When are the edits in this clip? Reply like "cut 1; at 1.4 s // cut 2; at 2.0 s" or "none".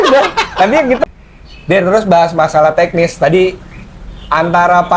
cut 1; at 1.1 s